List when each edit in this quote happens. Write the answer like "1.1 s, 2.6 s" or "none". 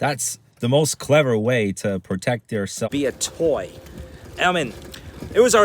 2.9 s